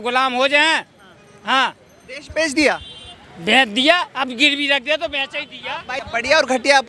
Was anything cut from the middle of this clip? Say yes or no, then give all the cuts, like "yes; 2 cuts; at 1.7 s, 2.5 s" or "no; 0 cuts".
no; 0 cuts